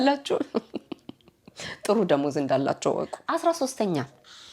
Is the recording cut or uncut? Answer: cut